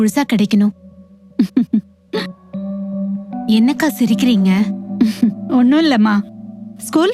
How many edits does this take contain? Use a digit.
0